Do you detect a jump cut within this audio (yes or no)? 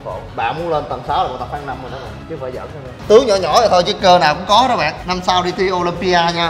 yes